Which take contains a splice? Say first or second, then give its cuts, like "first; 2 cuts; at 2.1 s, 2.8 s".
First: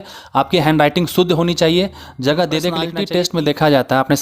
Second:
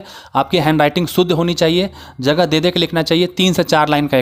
first; 1 cut; at 3.0 s